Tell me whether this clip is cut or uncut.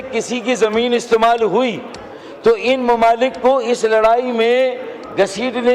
uncut